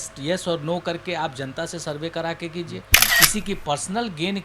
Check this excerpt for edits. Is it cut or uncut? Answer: cut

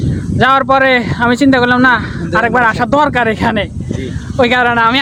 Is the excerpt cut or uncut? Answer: uncut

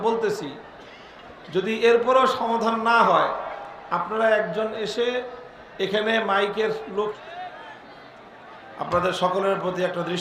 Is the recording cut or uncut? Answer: cut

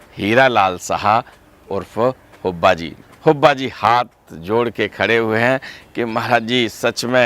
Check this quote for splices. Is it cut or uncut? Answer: cut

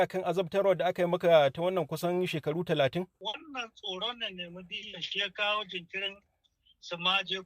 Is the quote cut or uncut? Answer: cut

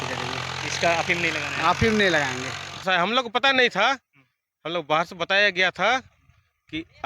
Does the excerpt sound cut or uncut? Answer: cut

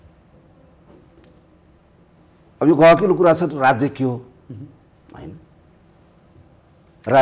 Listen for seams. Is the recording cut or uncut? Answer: uncut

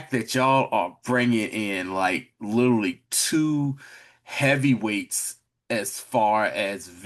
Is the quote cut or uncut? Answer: uncut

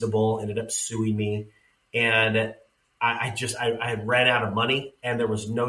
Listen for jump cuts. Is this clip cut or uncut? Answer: uncut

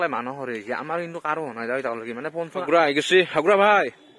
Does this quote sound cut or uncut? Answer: cut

